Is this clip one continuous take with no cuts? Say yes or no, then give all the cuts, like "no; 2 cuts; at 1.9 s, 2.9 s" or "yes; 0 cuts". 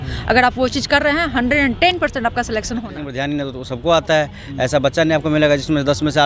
no; 1 cut; at 3.0 s